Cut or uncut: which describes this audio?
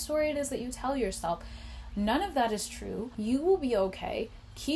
cut